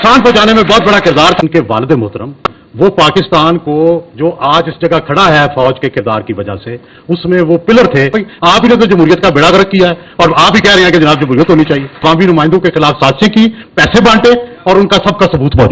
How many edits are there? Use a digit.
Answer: 3